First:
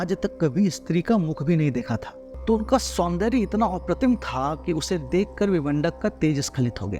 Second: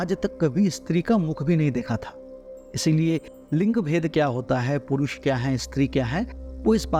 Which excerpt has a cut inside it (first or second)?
first